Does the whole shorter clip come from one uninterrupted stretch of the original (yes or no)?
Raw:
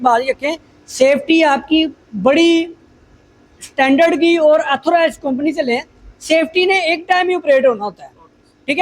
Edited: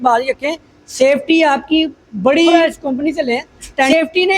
no